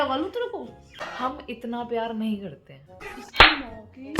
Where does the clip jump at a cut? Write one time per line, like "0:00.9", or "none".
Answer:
0:01.0
0:03.0